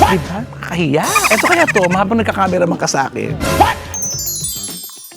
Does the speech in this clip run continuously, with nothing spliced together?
yes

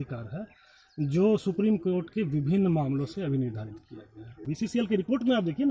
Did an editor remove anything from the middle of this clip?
yes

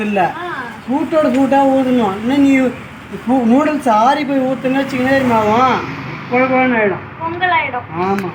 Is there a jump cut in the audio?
no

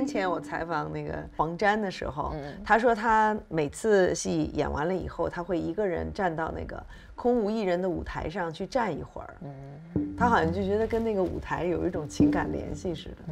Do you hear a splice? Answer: yes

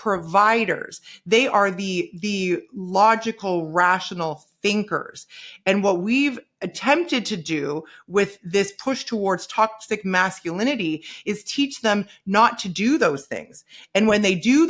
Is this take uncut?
yes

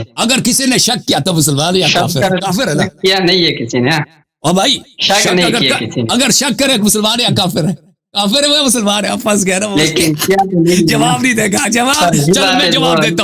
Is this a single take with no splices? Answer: yes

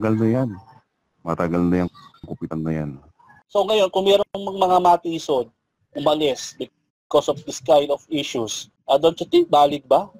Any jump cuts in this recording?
yes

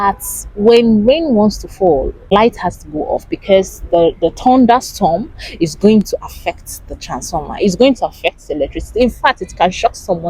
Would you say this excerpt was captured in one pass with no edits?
no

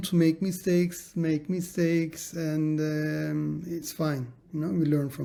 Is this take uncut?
yes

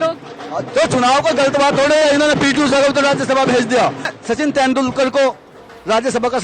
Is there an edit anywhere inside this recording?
yes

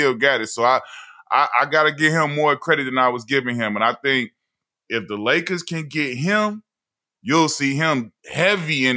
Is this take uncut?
yes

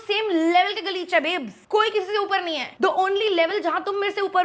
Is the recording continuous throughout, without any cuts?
yes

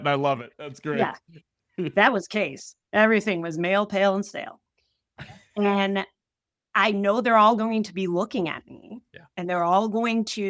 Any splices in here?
no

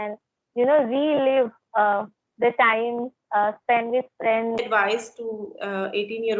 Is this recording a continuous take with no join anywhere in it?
no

